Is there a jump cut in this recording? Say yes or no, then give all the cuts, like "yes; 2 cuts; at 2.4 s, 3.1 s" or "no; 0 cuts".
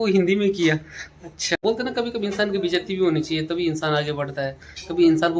yes; 1 cut; at 1.6 s